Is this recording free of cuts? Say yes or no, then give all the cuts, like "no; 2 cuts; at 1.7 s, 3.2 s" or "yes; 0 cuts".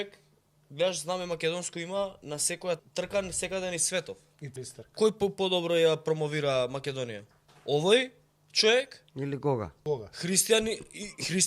no; 3 cuts; at 2.8 s, 4.5 s, 9.7 s